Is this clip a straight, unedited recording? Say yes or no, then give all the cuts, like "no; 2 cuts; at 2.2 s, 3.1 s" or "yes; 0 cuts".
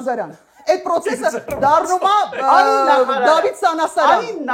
yes; 0 cuts